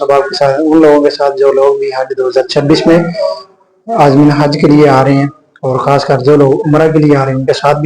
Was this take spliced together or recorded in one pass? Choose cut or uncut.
uncut